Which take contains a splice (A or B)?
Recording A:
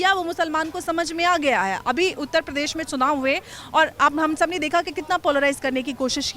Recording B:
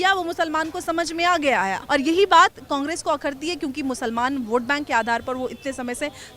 B